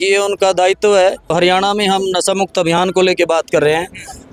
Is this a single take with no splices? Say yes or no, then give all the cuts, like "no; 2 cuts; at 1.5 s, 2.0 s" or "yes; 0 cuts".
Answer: no; 1 cut; at 1.3 s